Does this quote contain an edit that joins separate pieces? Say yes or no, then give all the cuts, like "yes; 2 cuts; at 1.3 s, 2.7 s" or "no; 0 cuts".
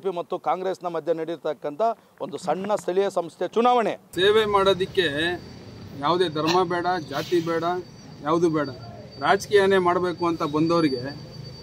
yes; 1 cut; at 4.0 s